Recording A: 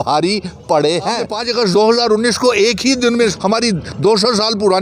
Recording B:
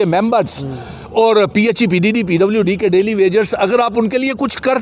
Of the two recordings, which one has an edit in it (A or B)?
A